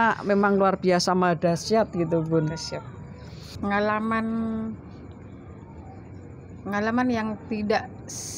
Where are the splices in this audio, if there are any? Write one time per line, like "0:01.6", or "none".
0:03.5